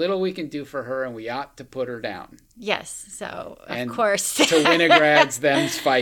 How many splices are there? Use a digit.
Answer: 0